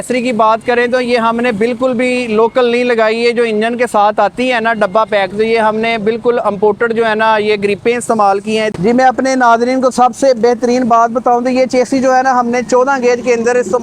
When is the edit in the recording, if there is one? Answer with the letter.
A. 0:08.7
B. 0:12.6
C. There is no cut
A